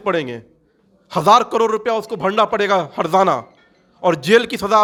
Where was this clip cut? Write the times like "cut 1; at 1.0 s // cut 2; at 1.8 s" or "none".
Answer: none